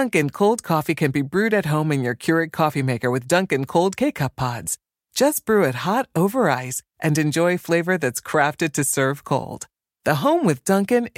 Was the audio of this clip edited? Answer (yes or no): no